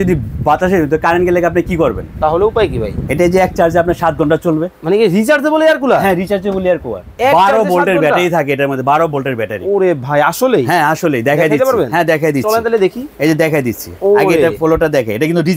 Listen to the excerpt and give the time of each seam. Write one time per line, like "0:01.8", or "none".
none

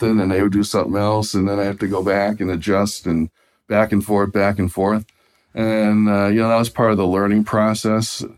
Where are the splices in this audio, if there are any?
none

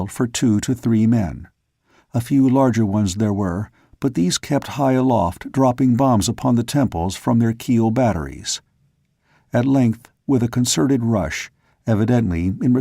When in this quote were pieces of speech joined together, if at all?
0:07.8

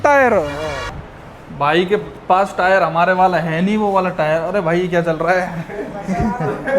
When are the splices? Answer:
0:00.9

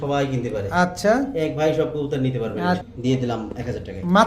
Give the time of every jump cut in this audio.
0:02.9

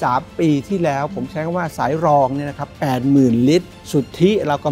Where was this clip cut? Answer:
0:03.8

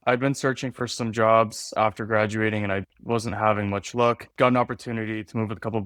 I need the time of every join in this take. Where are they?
none

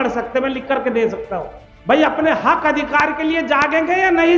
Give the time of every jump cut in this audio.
0:01.4

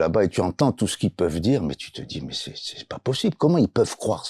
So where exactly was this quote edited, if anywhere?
none

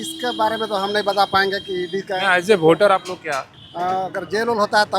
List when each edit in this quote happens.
0:03.6

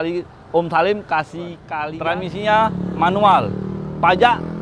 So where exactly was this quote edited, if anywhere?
0:01.6

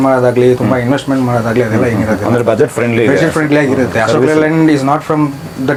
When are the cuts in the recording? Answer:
none

